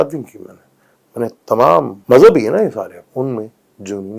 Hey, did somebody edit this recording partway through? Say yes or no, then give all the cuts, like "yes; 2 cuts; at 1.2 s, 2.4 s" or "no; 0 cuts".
yes; 2 cuts; at 2.0 s, 3.0 s